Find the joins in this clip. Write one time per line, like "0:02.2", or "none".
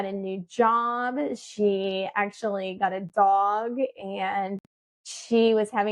none